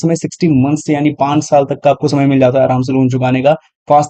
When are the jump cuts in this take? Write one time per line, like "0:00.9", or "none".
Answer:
none